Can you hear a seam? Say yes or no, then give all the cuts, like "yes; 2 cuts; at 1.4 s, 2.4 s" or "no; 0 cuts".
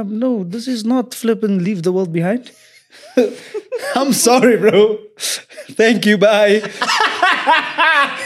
no; 0 cuts